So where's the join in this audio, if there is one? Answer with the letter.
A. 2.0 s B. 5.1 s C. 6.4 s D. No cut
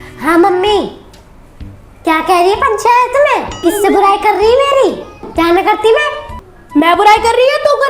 C